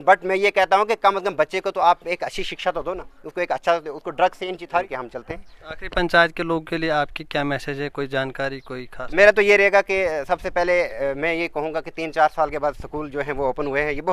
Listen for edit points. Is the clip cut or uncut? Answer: cut